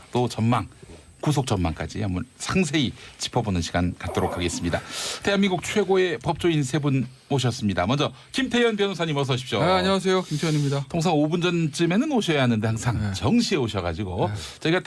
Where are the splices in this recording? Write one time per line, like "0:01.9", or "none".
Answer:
none